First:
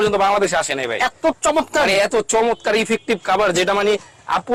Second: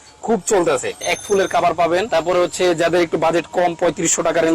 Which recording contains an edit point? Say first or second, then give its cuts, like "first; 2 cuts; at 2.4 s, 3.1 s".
second; 2 cuts; at 1.1 s, 2.1 s